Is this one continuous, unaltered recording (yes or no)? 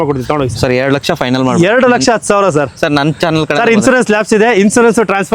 yes